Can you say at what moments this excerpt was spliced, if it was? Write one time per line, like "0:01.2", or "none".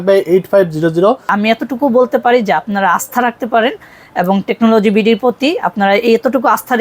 0:01.3